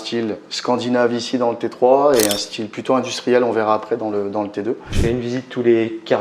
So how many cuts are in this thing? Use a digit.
1